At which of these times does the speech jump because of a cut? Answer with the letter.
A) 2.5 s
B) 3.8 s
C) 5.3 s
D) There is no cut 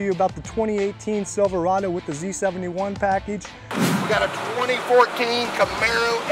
B